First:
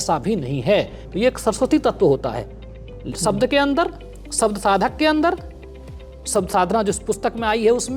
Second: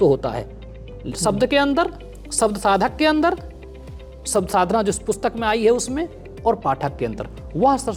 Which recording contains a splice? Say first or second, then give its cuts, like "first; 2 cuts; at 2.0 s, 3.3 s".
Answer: first; 1 cut; at 1.0 s